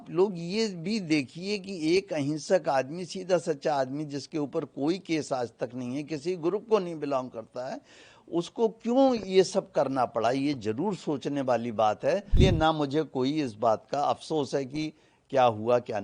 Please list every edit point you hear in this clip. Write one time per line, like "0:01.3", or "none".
0:12.4